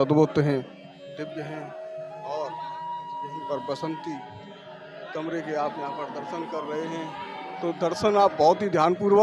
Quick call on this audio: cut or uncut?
uncut